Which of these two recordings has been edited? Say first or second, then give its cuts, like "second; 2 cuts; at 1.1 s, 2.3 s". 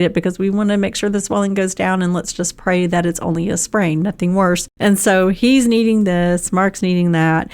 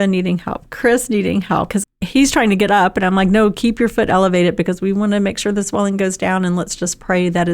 second; 1 cut; at 1.7 s